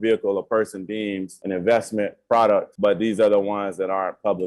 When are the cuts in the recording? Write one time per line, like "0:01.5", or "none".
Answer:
0:01.3
0:02.7